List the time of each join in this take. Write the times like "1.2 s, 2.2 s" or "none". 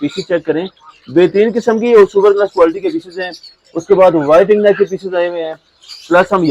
none